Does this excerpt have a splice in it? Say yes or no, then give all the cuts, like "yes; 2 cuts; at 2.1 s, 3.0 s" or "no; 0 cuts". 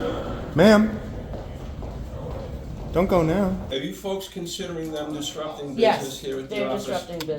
yes; 1 cut; at 3.7 s